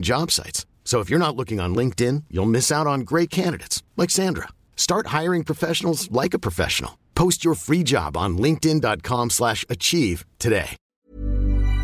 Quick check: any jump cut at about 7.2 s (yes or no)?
no